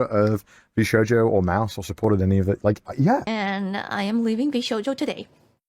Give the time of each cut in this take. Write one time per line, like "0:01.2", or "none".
0:03.3